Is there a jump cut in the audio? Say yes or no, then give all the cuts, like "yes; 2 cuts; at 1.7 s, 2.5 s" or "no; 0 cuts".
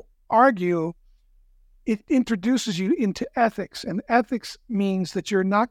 no; 0 cuts